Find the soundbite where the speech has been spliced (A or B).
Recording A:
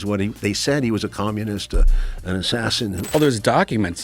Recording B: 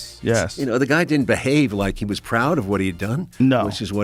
A